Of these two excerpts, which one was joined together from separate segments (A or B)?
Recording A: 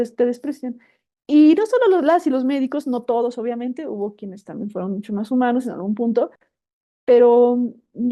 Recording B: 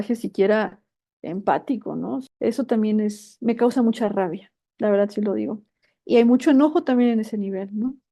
B